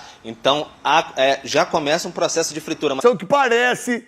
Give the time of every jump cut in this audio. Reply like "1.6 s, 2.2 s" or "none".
3.0 s